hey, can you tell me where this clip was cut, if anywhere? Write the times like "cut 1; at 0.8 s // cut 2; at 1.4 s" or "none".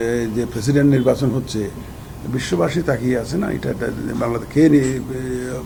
none